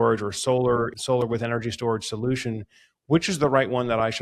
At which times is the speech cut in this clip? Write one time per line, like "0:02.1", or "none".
0:01.0